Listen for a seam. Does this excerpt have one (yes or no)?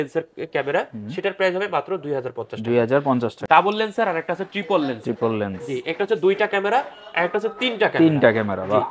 yes